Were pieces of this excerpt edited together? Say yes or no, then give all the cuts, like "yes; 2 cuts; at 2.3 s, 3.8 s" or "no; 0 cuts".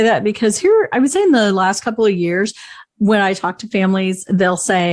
no; 0 cuts